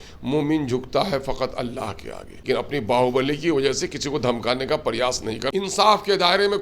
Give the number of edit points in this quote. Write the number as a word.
two